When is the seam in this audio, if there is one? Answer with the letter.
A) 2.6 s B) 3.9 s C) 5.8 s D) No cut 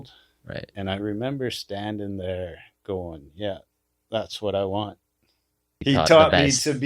C